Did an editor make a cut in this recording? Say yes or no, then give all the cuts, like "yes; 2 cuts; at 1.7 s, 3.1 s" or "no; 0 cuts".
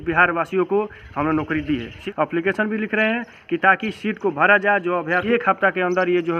yes; 2 cuts; at 2.0 s, 5.2 s